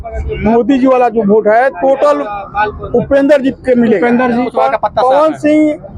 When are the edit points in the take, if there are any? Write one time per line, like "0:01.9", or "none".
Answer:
0:04.4